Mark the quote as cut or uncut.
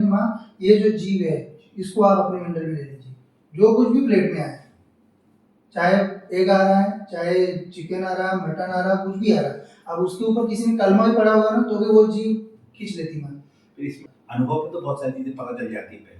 cut